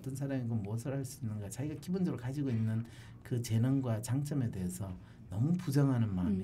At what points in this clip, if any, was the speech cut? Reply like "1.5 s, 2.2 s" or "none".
none